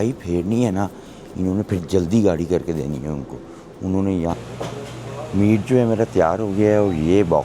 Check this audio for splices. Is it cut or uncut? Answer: cut